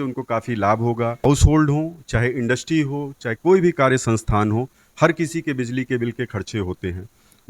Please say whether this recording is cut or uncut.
cut